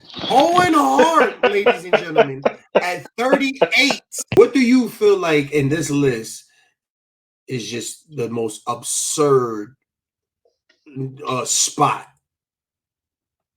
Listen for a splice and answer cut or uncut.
cut